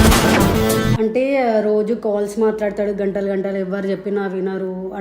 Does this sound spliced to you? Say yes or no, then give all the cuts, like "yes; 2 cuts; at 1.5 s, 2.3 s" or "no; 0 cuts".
yes; 1 cut; at 1.0 s